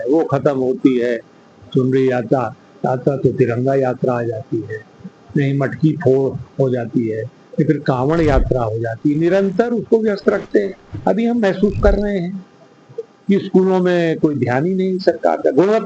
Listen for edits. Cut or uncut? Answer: cut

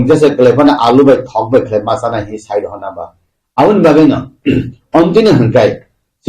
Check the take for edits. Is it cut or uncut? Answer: cut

